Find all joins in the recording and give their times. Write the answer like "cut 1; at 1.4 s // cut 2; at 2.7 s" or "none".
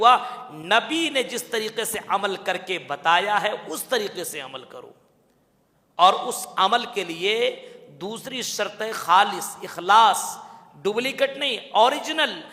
none